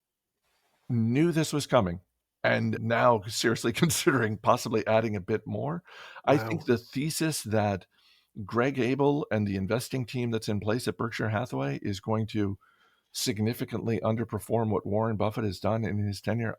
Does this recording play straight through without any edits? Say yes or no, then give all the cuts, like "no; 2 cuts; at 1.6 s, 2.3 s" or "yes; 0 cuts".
no; 1 cut; at 2.8 s